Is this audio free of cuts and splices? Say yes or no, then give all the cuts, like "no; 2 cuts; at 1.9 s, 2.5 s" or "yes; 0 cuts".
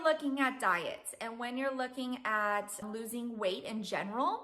no; 1 cut; at 2.8 s